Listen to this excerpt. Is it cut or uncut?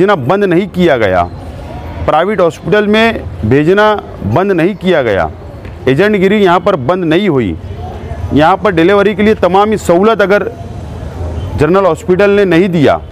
uncut